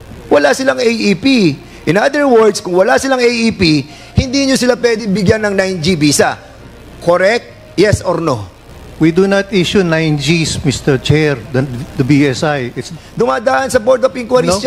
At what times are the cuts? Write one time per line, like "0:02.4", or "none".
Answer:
0:13.0